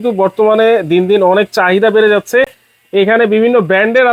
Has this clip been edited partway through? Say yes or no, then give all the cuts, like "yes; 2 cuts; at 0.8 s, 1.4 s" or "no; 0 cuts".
no; 0 cuts